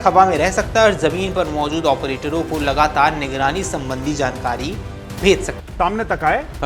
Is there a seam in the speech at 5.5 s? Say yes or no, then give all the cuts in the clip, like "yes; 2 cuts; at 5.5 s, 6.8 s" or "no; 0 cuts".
yes; 1 cut; at 5.5 s